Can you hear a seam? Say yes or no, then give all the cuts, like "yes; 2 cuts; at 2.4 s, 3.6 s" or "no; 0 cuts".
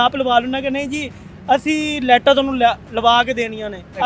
no; 0 cuts